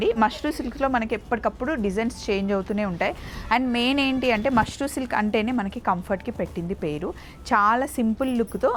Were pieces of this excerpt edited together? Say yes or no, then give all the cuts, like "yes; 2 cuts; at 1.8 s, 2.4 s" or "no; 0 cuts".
no; 0 cuts